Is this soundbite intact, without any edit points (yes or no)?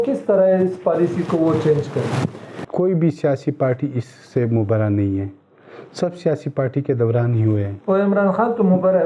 no